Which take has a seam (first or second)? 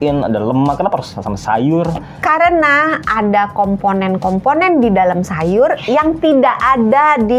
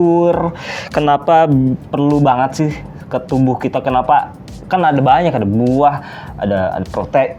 first